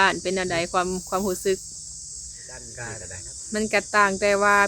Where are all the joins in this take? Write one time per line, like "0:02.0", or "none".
0:02.8